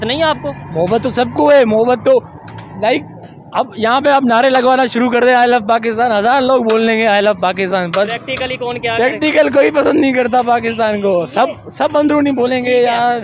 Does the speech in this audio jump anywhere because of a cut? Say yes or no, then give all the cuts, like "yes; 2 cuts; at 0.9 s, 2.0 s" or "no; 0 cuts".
no; 0 cuts